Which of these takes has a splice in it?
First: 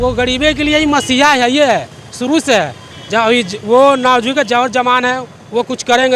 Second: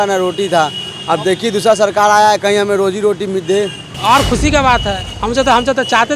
second; 1 cut; at 3.8 s

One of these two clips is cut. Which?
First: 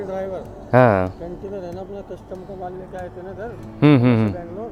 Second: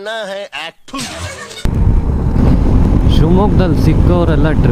second; 1 cut; at 1.6 s

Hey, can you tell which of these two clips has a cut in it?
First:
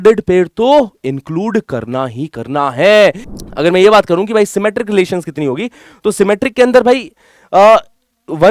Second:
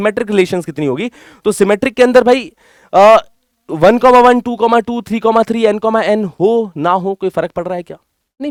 first; 1 cut; at 3.3 s

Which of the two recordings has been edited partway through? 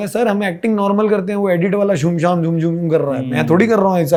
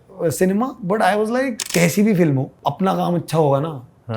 second; 2 cuts; at 1.6 s, 2.5 s

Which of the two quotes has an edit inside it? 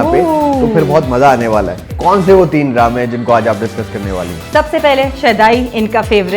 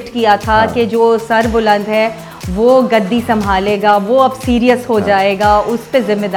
first; 1 cut; at 1.9 s

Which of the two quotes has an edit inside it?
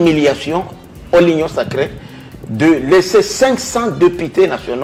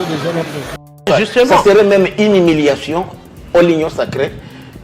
second; 1 cut; at 1.3 s

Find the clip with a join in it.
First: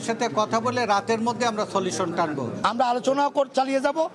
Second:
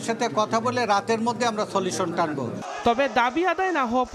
first; 1 cut; at 2.5 s

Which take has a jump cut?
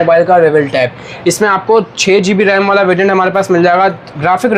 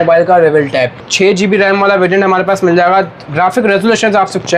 second; 1 cut; at 1.1 s

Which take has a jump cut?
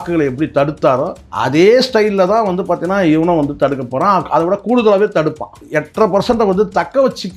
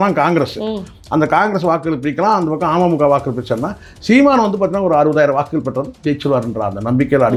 first; 2 cuts; at 1.2 s, 5.5 s

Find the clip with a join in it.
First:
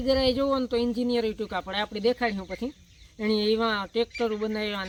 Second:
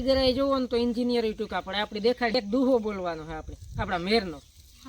second; 1 cut; at 2.4 s

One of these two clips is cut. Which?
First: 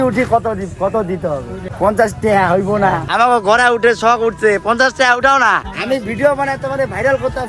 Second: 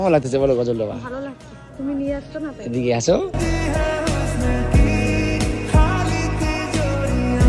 first; 3 cuts; at 1.6 s, 3.1 s, 5.7 s

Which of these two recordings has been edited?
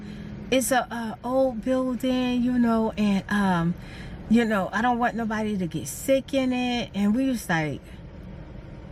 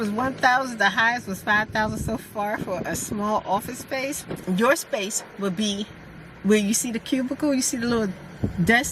second; 1 cut; at 4.3 s

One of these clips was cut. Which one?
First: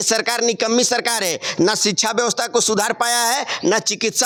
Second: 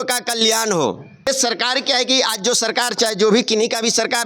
second; 1 cut; at 1.3 s

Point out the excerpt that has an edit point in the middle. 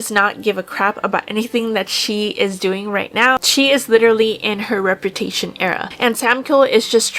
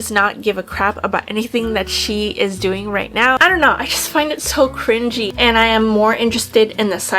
second; 2 cuts; at 3.4 s, 5.3 s

